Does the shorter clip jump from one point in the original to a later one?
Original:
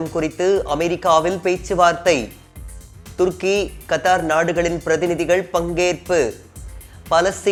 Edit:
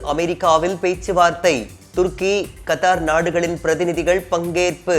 yes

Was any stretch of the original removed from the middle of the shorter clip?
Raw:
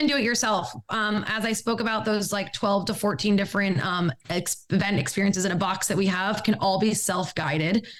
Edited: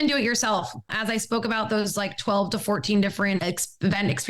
yes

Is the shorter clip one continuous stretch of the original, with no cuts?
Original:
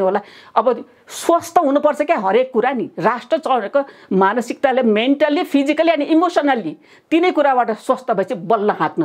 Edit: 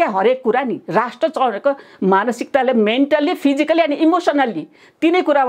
yes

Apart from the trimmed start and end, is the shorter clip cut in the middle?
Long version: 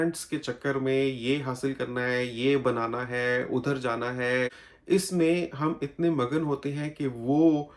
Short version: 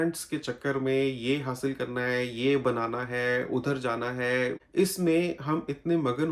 yes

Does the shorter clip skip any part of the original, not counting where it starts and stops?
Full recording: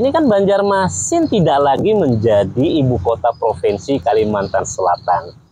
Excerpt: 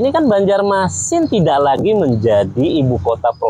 no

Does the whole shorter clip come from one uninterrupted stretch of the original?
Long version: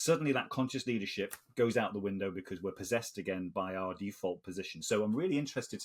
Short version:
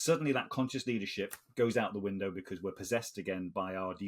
yes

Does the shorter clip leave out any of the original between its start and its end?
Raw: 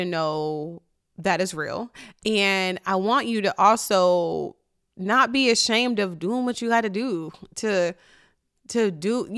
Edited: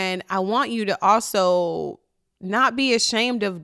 no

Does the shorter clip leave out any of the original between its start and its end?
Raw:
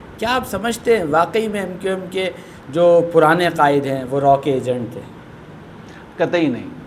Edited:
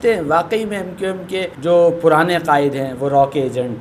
yes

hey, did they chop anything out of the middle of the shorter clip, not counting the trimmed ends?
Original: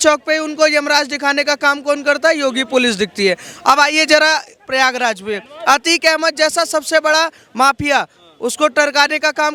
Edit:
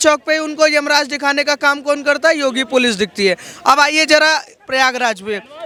no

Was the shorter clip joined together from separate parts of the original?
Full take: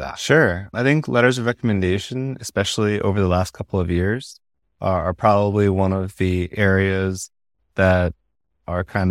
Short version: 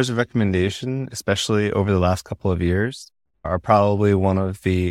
yes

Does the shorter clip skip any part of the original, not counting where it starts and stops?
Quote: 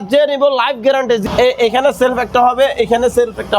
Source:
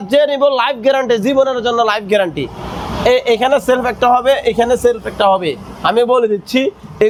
yes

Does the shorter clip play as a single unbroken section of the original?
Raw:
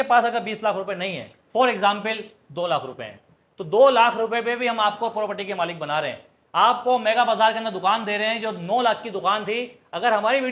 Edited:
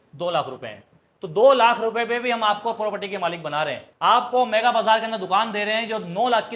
no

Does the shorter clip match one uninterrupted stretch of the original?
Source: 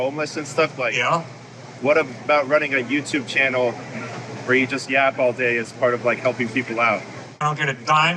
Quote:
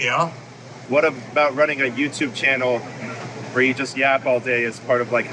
yes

